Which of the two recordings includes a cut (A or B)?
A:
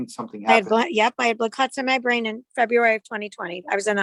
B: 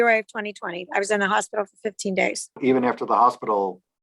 B